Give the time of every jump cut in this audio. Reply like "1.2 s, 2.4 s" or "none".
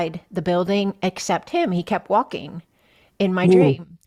none